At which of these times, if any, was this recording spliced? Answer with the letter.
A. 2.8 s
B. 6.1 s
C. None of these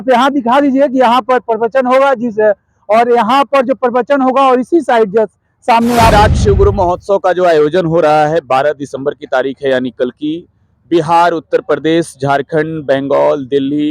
B